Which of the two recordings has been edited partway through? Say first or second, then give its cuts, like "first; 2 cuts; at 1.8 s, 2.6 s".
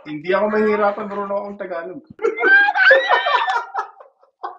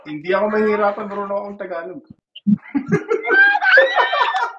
first; 1 cut; at 2.2 s